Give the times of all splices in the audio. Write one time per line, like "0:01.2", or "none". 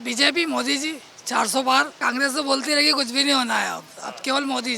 0:01.9